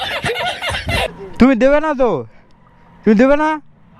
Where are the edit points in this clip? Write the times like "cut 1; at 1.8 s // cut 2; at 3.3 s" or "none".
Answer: cut 1; at 1.1 s

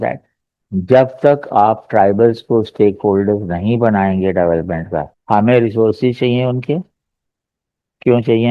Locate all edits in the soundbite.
cut 1; at 5.1 s

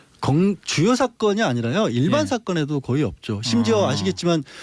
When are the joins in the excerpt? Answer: cut 1; at 1.6 s

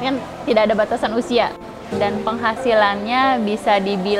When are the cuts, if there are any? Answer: cut 1; at 1.9 s

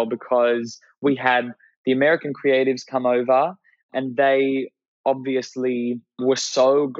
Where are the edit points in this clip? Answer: cut 1; at 3.9 s // cut 2; at 6.2 s

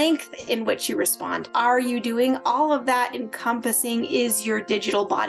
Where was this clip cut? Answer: cut 1; at 1.4 s

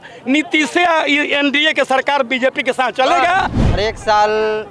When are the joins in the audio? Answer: cut 1; at 3.6 s

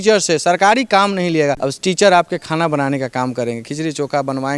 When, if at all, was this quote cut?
cut 1; at 1.7 s

